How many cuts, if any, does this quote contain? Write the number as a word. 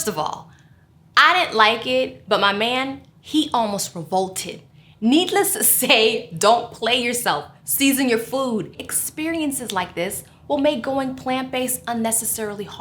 one